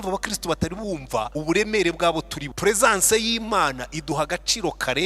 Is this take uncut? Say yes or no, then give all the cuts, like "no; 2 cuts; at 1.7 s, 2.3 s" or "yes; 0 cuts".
no; 2 cuts; at 1.3 s, 2.4 s